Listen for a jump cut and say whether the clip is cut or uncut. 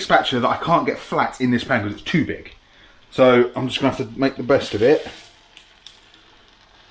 uncut